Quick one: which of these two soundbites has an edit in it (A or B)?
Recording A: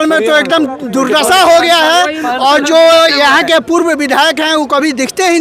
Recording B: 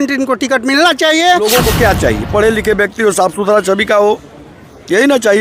B